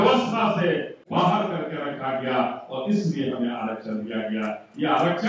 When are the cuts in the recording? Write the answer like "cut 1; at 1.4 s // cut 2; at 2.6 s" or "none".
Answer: cut 1; at 0.9 s